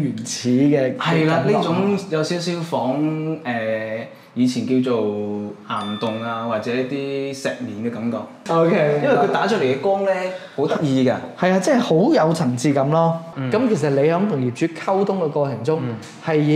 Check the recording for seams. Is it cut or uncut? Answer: cut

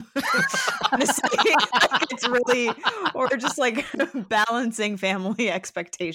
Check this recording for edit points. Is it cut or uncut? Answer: uncut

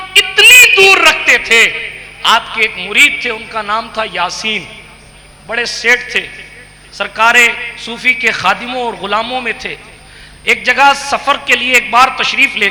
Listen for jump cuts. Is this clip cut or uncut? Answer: uncut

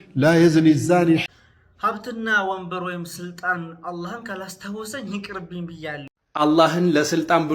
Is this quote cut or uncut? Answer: cut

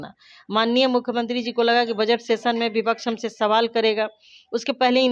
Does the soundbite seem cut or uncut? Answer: uncut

